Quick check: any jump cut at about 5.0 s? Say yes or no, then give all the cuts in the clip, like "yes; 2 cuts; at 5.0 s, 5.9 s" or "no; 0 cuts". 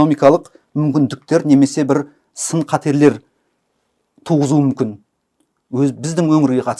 no; 0 cuts